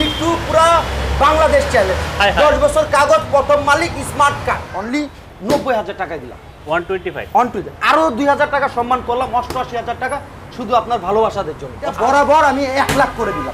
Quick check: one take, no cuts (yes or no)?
no